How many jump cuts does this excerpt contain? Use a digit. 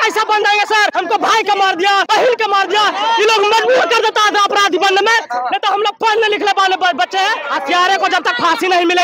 3